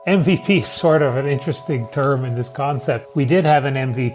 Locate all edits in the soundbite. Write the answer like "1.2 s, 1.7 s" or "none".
3.0 s